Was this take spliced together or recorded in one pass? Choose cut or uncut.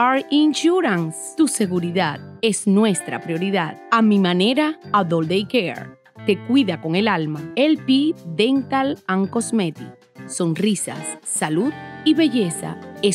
uncut